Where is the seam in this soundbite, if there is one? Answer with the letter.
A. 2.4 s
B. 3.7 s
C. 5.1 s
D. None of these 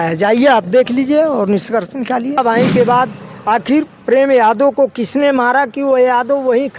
A